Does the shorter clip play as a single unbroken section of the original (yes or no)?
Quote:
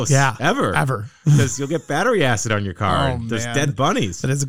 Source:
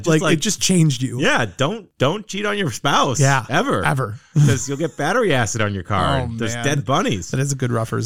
yes